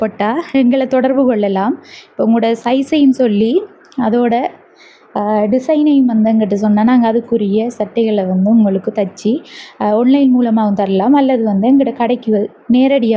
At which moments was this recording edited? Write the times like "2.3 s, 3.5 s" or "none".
none